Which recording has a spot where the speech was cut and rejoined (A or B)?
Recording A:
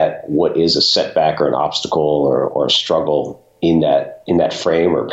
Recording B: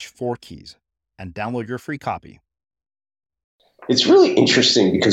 B